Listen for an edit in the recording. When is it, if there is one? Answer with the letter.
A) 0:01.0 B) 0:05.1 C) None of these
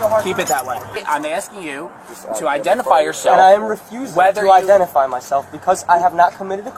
A